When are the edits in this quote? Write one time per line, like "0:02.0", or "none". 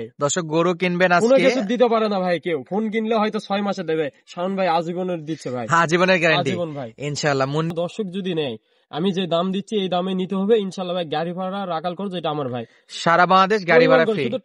0:07.7